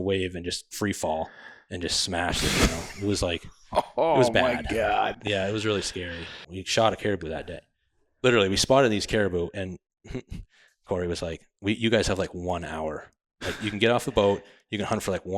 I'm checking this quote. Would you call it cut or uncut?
cut